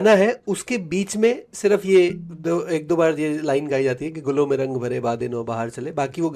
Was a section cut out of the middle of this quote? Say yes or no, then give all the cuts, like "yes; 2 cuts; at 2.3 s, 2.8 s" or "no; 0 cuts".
no; 0 cuts